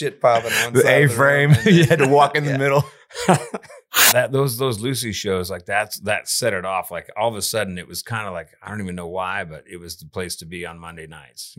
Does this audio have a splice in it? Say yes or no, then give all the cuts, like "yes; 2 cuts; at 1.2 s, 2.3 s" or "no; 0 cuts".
yes; 1 cut; at 4.1 s